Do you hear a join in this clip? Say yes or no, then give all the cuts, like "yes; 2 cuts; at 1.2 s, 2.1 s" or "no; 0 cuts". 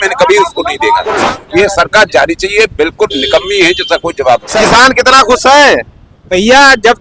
yes; 2 cuts; at 1.1 s, 4.5 s